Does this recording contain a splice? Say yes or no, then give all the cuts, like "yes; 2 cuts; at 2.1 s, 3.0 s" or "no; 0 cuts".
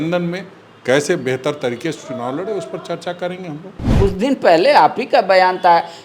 yes; 1 cut; at 3.9 s